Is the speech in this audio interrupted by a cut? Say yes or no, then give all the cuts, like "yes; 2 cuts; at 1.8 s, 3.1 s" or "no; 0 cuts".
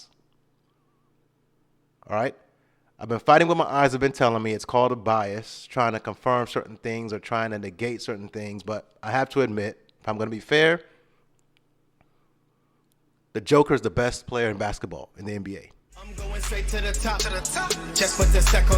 yes; 1 cut; at 16.0 s